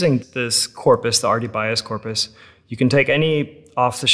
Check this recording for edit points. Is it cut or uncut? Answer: uncut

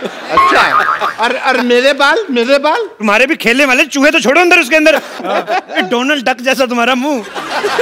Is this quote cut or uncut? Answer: cut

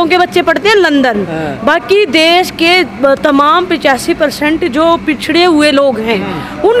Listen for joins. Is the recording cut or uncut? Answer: uncut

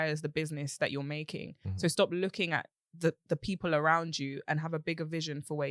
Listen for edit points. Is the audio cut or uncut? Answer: uncut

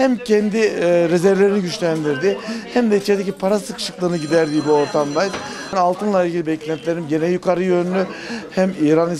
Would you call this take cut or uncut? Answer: cut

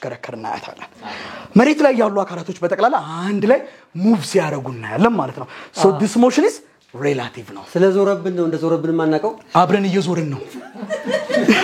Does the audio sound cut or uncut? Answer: uncut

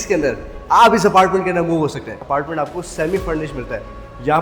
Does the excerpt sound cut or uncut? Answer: cut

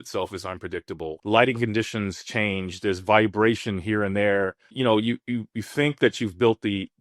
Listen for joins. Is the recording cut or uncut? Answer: cut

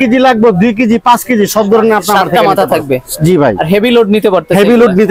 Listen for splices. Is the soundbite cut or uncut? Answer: uncut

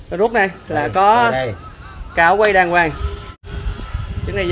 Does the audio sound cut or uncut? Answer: cut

